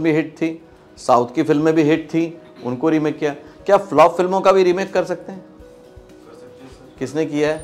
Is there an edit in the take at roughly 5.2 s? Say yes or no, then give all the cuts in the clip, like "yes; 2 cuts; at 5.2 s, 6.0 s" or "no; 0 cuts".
no; 0 cuts